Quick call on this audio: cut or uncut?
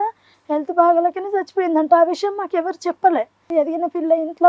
cut